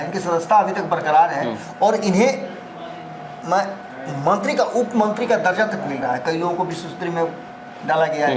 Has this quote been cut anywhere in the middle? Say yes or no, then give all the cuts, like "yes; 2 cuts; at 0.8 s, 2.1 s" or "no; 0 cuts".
no; 0 cuts